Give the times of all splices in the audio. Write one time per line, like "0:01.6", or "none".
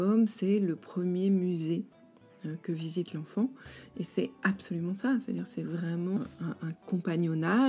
0:06.2